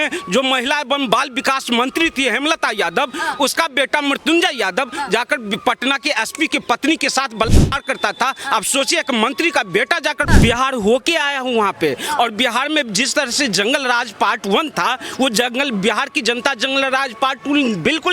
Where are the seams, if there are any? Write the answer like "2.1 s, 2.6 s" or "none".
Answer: 10.2 s